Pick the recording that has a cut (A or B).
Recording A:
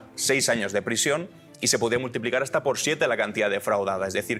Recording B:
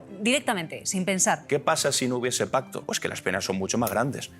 B